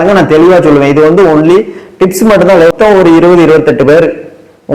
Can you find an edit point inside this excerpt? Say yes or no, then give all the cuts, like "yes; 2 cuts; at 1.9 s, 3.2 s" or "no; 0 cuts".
yes; 1 cut; at 2.7 s